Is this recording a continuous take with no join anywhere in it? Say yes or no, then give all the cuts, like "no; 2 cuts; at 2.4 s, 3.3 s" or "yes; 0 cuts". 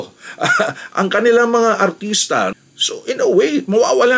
no; 1 cut; at 2.6 s